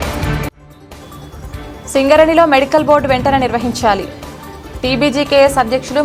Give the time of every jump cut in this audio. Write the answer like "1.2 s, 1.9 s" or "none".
none

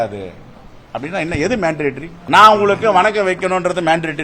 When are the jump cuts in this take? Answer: 2.1 s

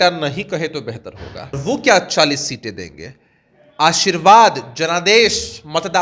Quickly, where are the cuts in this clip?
1.6 s

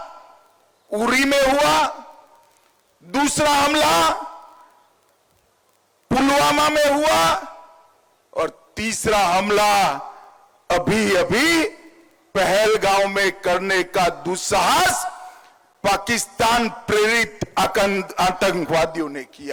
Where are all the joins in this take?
none

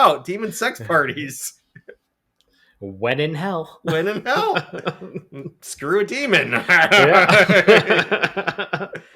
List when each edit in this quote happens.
none

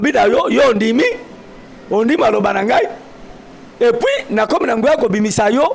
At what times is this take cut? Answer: none

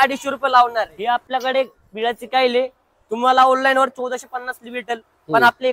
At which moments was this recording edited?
1.2 s

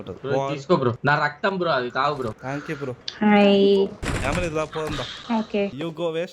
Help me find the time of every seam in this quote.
1.0 s, 2.4 s, 4.0 s, 5.1 s

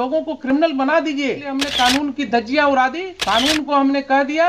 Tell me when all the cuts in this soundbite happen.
1.6 s, 3.1 s

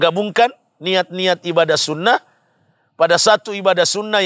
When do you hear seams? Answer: none

